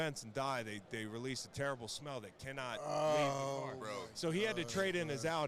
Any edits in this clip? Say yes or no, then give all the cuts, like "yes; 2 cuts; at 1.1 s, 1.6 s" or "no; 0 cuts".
no; 0 cuts